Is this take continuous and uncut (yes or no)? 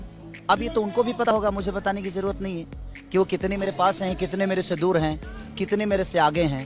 no